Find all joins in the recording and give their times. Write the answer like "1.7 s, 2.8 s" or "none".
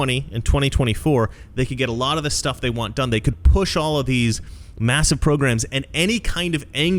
none